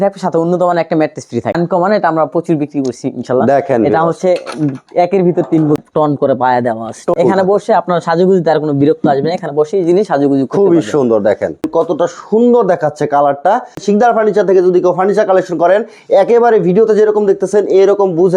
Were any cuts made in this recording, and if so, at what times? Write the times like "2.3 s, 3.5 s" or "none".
1.5 s, 5.8 s, 7.2 s, 11.7 s, 13.8 s